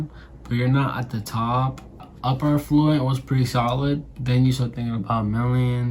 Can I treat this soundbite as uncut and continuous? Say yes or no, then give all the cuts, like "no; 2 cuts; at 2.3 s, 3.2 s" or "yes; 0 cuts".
no; 1 cut; at 2.1 s